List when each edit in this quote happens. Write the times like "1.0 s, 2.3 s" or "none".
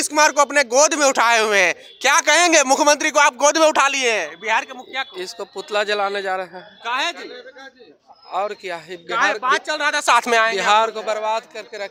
none